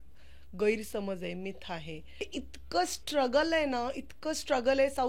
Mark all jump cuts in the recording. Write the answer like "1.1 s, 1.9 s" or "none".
2.2 s